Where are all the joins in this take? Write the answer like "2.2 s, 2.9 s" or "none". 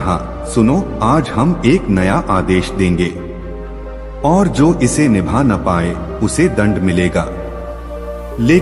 none